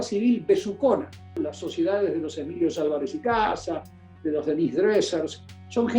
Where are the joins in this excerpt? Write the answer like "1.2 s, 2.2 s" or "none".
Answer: 1.4 s